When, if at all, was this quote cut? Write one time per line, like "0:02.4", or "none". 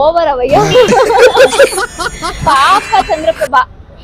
0:02.4